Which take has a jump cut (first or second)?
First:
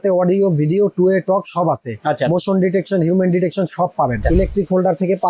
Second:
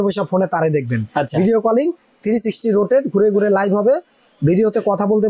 first